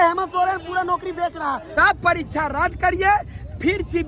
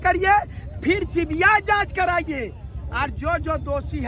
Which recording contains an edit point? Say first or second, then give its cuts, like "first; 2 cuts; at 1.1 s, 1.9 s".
first; 1 cut; at 1.7 s